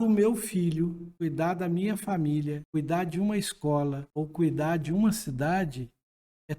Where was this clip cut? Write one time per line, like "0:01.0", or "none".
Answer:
0:01.0
0:02.6
0:04.0

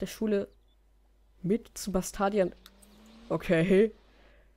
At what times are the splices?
none

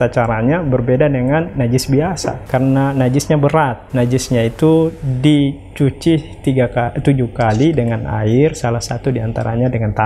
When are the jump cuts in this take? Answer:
0:02.4
0:03.8

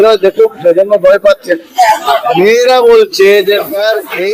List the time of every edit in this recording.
0:02.0

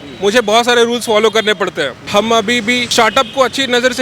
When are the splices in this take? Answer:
0:02.0
0:02.8

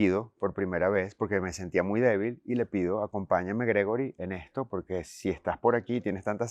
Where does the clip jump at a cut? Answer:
none

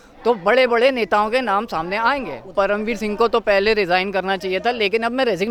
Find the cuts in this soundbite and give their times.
0:02.5

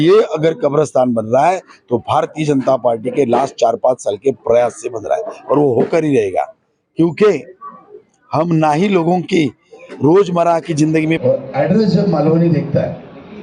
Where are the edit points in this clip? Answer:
0:11.2

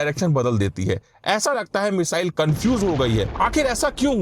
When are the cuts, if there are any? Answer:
0:03.3

